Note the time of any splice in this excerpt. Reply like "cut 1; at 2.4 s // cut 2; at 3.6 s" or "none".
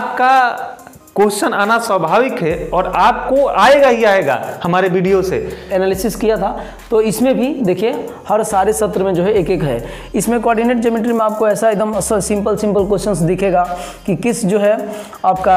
cut 1; at 5.6 s